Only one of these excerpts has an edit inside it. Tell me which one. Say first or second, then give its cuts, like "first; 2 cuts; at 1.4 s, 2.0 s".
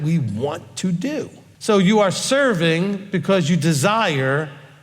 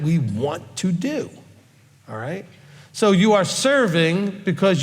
first; 1 cut; at 1.4 s